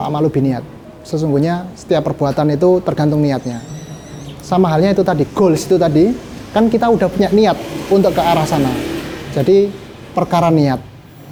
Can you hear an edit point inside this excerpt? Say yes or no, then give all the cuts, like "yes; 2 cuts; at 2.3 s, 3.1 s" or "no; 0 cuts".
no; 0 cuts